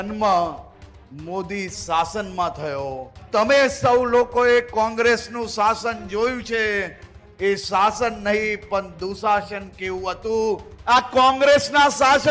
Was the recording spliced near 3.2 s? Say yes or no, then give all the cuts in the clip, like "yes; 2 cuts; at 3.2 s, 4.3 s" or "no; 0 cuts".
yes; 2 cuts; at 3.2 s, 10.7 s